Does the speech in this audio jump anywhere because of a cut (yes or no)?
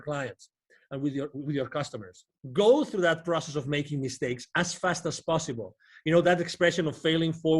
yes